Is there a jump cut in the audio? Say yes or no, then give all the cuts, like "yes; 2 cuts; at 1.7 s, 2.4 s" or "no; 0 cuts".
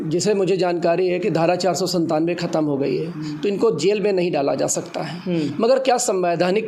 no; 0 cuts